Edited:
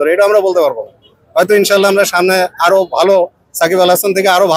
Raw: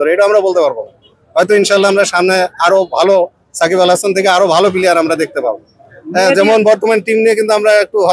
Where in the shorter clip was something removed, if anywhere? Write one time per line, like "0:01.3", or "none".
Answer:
none